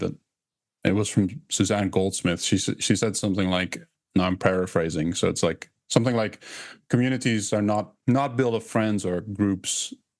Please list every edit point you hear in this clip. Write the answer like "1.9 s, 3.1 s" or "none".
6.8 s, 7.9 s